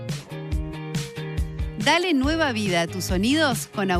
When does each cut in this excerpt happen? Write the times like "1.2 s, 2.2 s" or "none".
1.8 s